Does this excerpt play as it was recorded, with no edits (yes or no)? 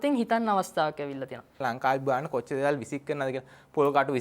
no